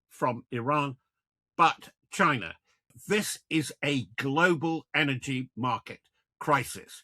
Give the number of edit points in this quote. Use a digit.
1